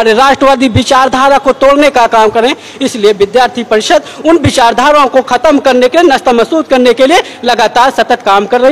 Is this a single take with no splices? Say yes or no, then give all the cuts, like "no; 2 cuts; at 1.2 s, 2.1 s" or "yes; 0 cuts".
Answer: yes; 0 cuts